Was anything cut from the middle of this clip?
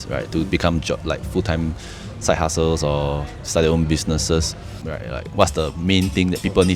yes; 1 cut; at 4.9 s

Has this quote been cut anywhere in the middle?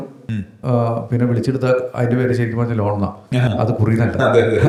no; 0 cuts

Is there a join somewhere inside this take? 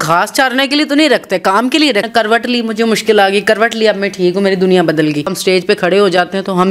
yes; 2 cuts; at 2.1 s, 5.4 s

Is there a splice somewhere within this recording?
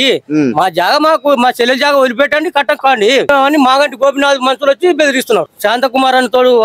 yes; 2 cuts; at 3.3 s, 5.5 s

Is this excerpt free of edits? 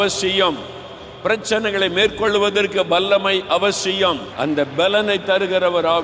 no; 1 cut; at 4.3 s

